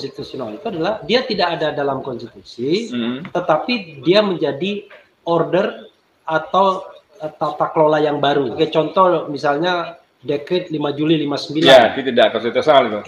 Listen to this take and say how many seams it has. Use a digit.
1